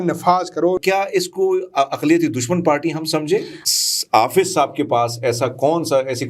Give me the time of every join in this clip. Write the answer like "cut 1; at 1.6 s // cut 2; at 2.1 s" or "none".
cut 1; at 0.8 s // cut 2; at 3.6 s